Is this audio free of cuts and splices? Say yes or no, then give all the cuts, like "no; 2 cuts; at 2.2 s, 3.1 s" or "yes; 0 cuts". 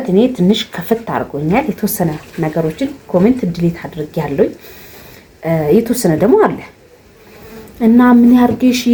yes; 0 cuts